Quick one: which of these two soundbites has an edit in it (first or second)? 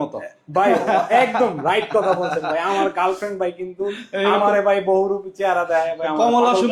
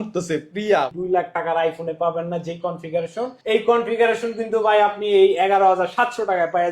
second